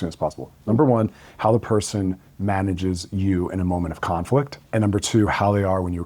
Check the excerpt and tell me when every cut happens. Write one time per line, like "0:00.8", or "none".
0:04.6